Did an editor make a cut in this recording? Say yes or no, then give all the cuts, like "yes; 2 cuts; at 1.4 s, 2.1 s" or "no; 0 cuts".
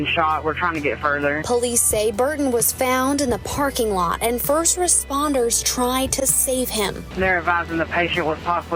no; 0 cuts